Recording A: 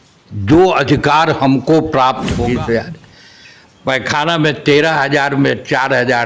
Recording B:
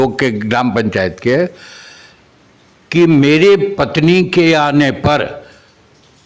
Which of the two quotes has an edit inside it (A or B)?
A